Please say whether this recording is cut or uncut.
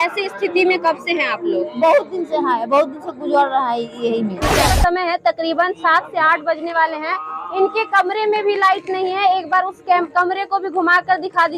cut